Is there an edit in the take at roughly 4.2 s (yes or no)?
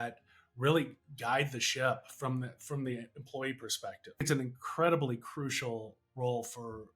yes